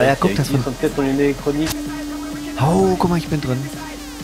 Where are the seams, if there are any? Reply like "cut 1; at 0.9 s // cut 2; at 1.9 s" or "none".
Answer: cut 1; at 1.8 s

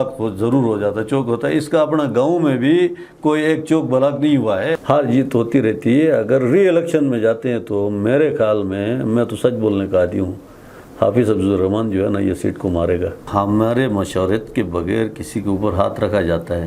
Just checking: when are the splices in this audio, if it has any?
cut 1; at 4.8 s // cut 2; at 13.2 s

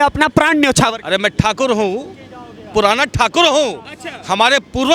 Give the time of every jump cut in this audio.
none

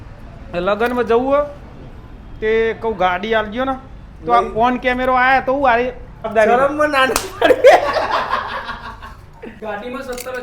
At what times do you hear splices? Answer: cut 1; at 6.3 s // cut 2; at 9.5 s

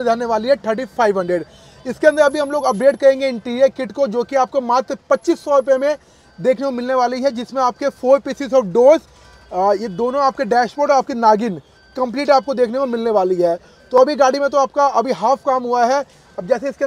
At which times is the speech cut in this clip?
none

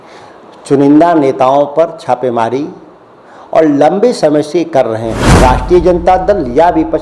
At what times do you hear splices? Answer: cut 1; at 5.2 s

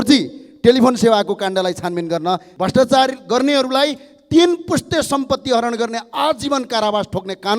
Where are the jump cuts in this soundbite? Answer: cut 1; at 2.5 s

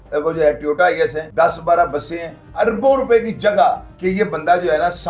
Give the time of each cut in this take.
cut 1; at 1.2 s // cut 2; at 2.5 s // cut 3; at 3.9 s

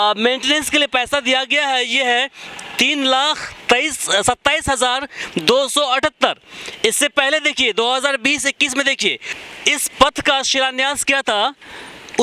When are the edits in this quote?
cut 1; at 9.3 s

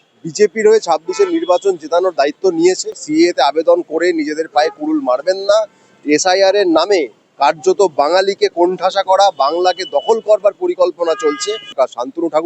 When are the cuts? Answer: cut 1; at 3.0 s // cut 2; at 11.7 s

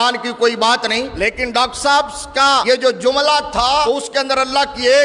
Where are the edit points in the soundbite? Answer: cut 1; at 1.1 s // cut 2; at 2.6 s // cut 3; at 3.8 s

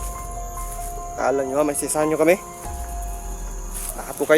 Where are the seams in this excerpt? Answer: cut 1; at 1.1 s

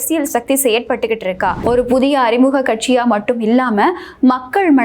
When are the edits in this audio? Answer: cut 1; at 1.6 s

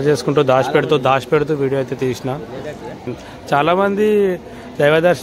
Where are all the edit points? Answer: cut 1; at 3.1 s

